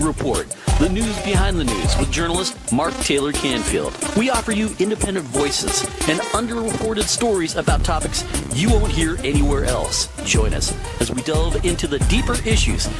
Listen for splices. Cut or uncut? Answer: cut